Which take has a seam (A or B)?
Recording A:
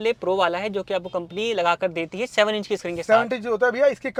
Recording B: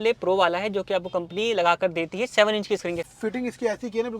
B